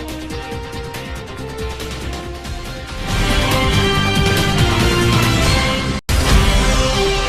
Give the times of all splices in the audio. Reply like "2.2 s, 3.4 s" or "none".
none